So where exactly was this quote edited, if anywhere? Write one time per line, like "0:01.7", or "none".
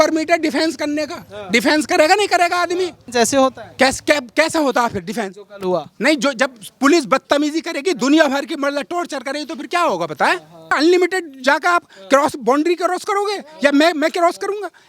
0:03.0
0:10.7